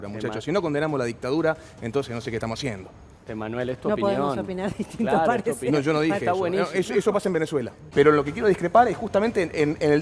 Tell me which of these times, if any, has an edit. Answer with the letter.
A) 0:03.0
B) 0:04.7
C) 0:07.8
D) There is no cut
C